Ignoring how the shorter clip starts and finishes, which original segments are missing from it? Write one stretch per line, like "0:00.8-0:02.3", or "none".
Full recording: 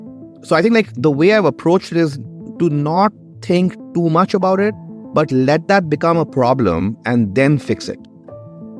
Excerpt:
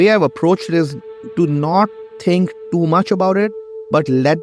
none

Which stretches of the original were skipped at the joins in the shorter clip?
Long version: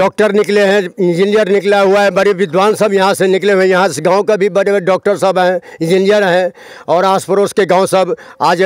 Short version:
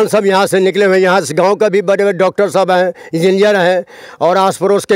none

